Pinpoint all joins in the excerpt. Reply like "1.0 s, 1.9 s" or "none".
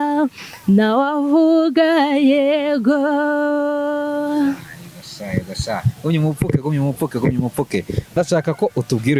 8.1 s